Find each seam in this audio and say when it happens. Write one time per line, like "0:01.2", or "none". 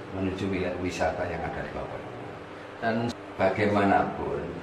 0:03.1